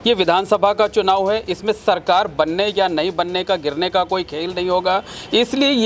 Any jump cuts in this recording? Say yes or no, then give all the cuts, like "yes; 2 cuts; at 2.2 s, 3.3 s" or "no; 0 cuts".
no; 0 cuts